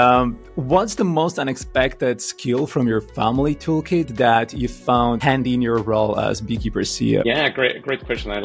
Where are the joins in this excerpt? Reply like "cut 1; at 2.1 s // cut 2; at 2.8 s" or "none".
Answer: cut 1; at 5.2 s // cut 2; at 7.2 s